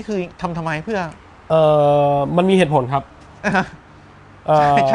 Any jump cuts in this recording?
no; 0 cuts

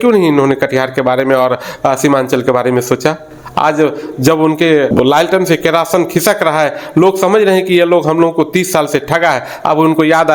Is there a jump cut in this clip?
no; 0 cuts

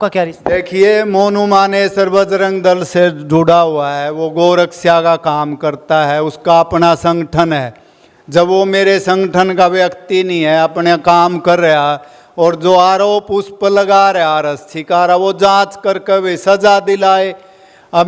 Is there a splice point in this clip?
no; 0 cuts

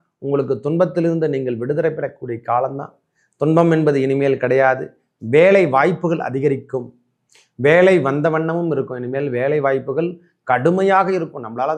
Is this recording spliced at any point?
no; 0 cuts

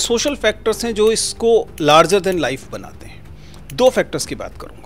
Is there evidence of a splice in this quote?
no; 0 cuts

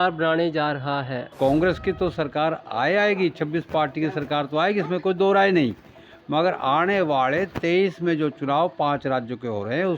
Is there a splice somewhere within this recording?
yes; 1 cut; at 1.2 s

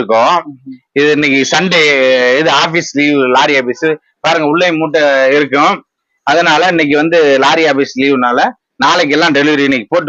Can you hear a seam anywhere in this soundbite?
no; 0 cuts

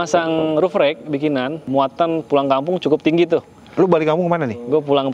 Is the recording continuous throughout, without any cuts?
no; 1 cut; at 1.7 s

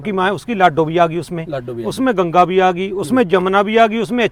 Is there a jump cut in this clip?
no; 0 cuts

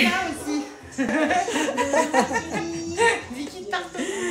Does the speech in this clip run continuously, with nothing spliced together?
no; 1 cut; at 1.1 s

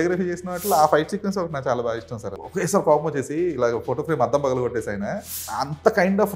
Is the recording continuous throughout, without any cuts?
no; 2 cuts; at 2.4 s, 5.5 s

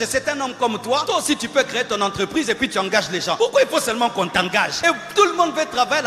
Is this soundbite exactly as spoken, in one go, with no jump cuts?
no; 3 cuts; at 1.0 s, 3.4 s, 4.7 s

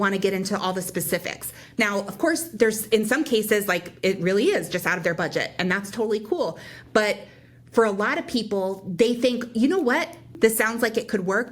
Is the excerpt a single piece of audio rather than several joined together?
no; 1 cut; at 10.3 s

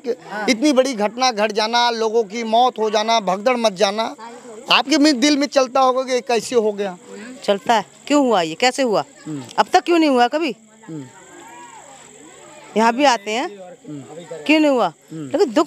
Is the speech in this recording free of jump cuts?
yes; 0 cuts

